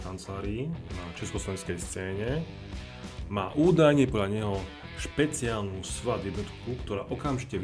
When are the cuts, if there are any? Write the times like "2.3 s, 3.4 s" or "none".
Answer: none